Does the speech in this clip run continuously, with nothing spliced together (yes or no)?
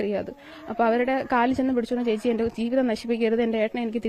yes